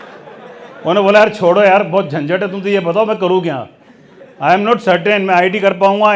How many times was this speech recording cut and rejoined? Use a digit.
0